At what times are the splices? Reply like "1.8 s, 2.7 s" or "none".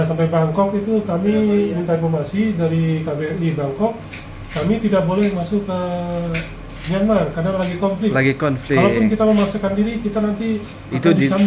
none